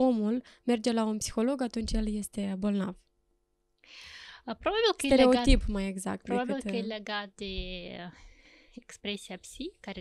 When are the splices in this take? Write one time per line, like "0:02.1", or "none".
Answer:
none